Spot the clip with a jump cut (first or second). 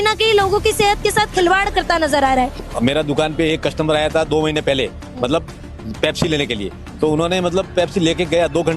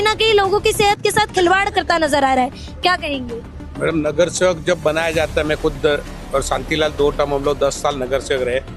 first